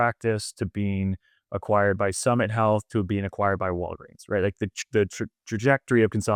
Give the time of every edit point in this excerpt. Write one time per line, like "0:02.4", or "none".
none